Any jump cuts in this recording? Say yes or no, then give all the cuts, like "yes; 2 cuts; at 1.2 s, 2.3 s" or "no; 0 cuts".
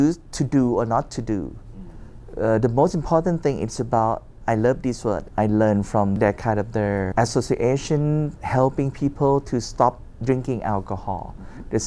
no; 0 cuts